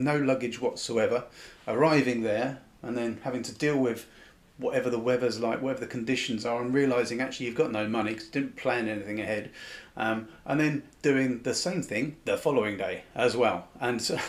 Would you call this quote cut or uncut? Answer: uncut